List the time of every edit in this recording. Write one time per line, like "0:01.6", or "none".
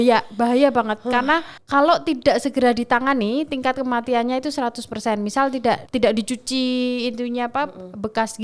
0:01.6
0:05.8